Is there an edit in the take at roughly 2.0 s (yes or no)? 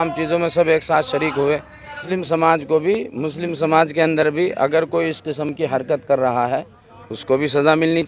yes